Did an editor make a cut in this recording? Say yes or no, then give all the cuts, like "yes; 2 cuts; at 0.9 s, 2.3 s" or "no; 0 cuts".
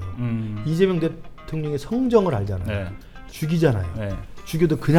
no; 0 cuts